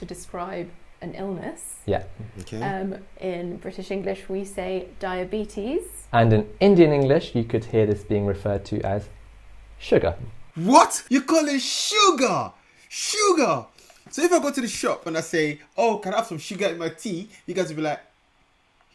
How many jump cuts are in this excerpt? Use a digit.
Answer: 0